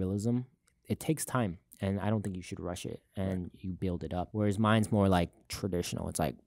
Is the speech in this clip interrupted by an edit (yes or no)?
yes